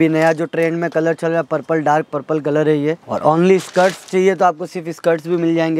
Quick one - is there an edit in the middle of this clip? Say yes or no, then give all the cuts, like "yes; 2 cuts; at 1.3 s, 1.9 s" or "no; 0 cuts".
yes; 1 cut; at 3.1 s